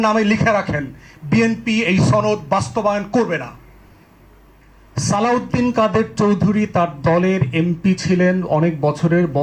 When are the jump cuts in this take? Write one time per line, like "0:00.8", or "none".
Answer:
0:04.6